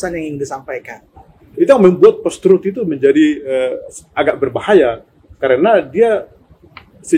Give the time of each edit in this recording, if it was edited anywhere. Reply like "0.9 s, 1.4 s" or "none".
1.5 s